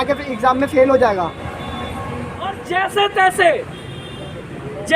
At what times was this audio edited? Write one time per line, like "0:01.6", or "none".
0:02.5